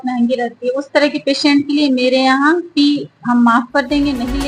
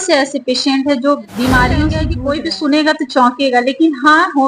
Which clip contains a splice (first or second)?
second